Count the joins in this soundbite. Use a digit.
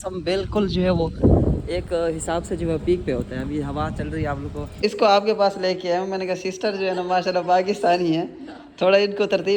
1